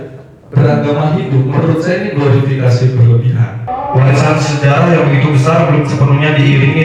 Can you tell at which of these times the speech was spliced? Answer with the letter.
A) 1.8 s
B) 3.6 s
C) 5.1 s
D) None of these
B